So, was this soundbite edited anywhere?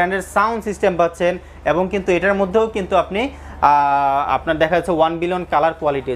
no; 0 cuts

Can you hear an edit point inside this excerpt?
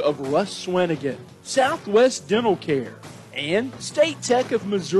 no; 0 cuts

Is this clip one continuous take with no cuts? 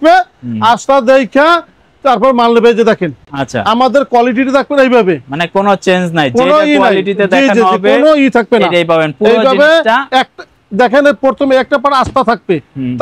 yes; 0 cuts

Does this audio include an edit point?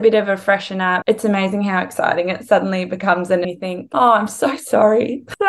yes; 2 cuts; at 1.0 s, 3.5 s

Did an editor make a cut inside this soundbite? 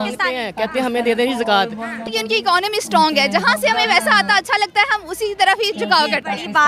yes; 1 cut; at 2.1 s

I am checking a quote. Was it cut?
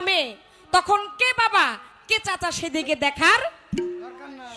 no; 0 cuts

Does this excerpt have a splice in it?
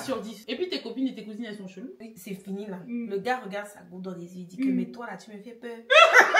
yes; 1 cut; at 2.0 s

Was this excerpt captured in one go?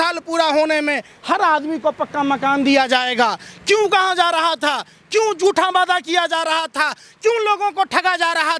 yes; 0 cuts

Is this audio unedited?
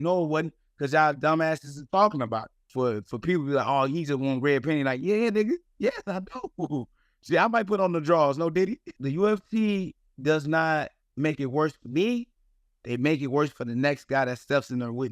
no; 2 cuts; at 2.6 s, 8.9 s

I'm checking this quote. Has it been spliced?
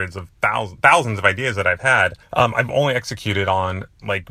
yes; 1 cut; at 2.2 s

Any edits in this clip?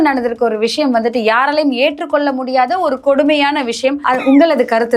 yes; 1 cut; at 4.0 s

